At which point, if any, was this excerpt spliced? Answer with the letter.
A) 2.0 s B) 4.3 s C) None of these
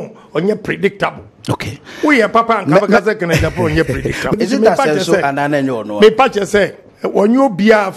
B